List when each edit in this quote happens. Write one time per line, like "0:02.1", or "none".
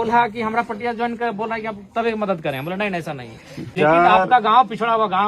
0:03.7